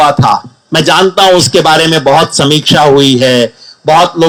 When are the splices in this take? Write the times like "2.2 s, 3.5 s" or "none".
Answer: none